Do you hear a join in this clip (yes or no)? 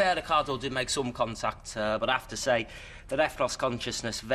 no